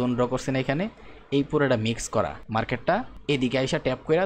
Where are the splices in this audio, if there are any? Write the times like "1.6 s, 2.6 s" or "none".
2.7 s